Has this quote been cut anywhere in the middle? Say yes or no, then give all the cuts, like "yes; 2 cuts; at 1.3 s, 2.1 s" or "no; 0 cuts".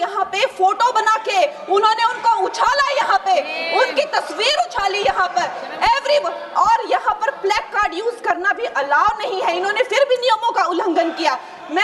no; 0 cuts